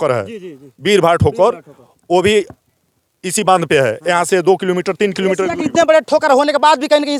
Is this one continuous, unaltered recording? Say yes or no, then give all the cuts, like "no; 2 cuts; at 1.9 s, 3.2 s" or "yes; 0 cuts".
yes; 0 cuts